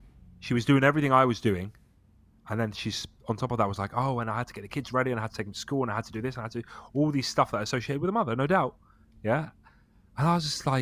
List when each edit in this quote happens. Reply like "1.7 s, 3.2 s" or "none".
none

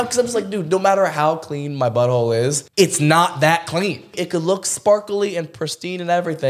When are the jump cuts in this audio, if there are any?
2.6 s, 4.1 s

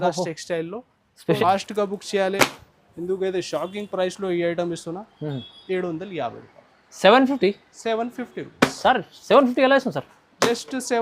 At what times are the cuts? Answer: 1.4 s

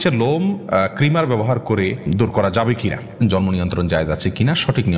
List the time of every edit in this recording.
2.1 s, 3.2 s

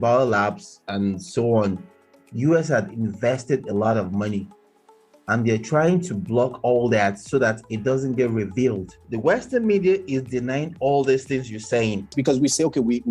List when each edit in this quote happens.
9.0 s, 12.1 s

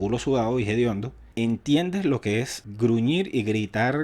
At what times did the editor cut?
2.6 s

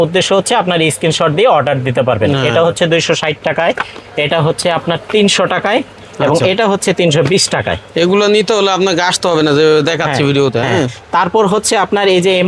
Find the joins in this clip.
none

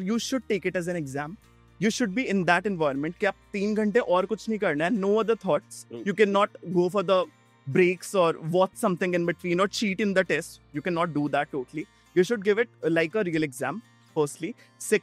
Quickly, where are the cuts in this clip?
none

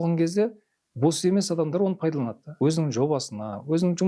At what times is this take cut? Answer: 2.4 s

